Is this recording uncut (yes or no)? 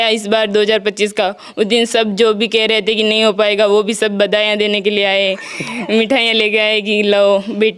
yes